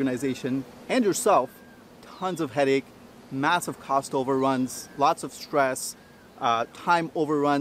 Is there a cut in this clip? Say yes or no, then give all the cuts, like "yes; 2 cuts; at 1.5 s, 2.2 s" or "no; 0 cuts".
no; 0 cuts